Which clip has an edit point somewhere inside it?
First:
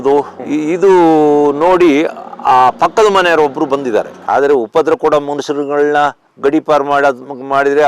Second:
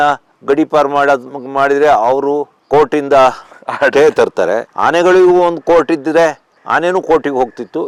first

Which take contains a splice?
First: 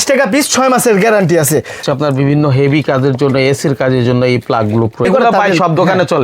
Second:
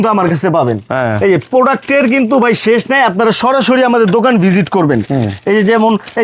first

